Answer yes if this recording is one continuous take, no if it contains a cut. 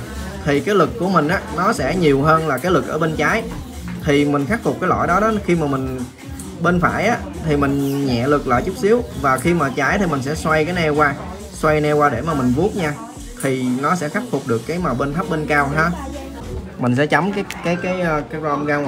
no